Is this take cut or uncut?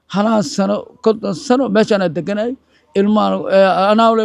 uncut